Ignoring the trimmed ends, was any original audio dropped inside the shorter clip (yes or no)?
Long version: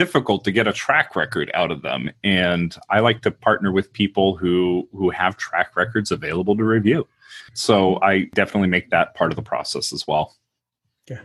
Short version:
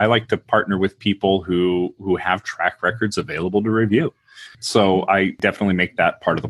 no